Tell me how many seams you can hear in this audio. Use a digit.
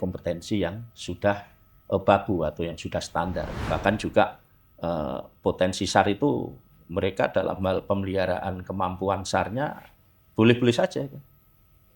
1